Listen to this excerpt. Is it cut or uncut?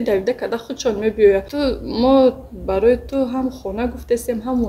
cut